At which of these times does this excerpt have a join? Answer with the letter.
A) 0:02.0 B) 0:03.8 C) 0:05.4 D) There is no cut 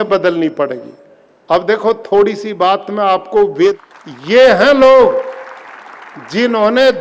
B